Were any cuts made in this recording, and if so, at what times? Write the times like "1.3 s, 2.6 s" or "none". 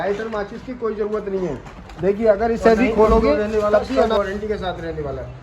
4.2 s

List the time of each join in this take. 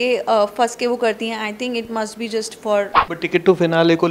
3.0 s

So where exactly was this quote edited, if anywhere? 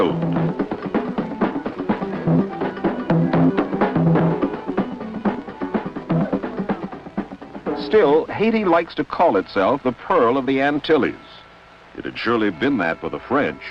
10.5 s

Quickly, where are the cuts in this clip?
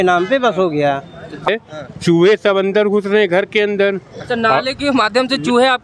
1.5 s

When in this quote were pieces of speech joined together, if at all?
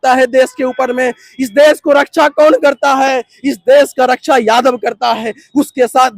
none

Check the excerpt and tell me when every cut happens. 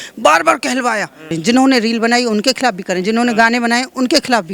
1.3 s

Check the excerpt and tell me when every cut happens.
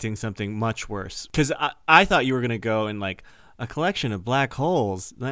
1.2 s

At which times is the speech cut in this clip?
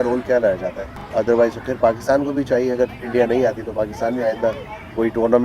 1.0 s

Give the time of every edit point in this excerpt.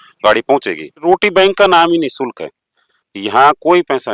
1.0 s

